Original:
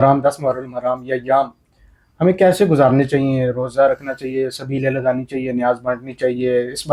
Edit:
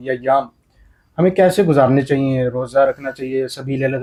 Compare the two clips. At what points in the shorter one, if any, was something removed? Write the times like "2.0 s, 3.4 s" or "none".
none